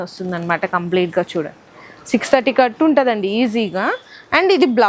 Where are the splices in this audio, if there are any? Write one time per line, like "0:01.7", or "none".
none